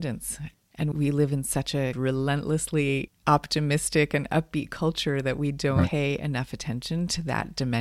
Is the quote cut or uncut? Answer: cut